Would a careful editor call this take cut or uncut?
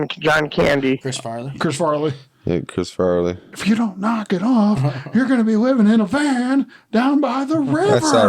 cut